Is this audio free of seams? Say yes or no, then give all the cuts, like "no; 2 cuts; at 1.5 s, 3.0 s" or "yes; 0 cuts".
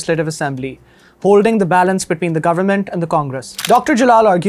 no; 1 cut; at 3.5 s